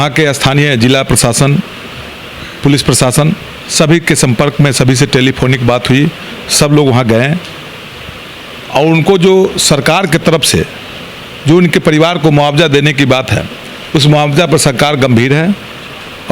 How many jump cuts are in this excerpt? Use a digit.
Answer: 0